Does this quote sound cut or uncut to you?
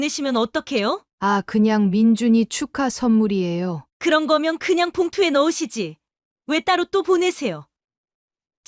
cut